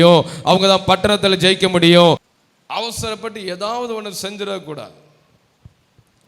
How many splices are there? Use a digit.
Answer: 1